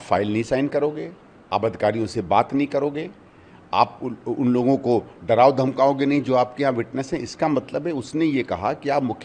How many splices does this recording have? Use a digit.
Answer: 0